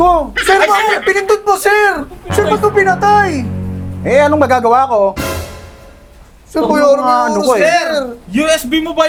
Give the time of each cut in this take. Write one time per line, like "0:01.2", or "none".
none